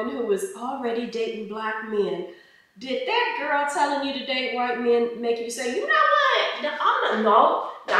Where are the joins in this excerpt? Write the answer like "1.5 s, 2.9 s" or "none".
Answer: none